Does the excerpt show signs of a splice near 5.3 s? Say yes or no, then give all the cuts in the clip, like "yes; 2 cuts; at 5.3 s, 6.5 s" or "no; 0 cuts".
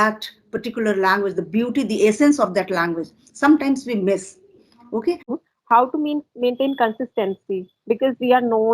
yes; 1 cut; at 5.3 s